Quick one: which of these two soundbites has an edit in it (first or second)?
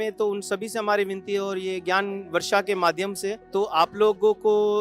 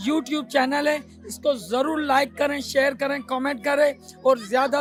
first